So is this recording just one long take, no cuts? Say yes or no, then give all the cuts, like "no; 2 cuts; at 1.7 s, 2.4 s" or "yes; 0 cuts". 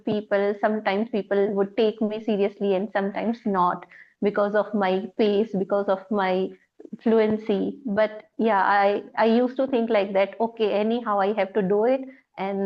yes; 0 cuts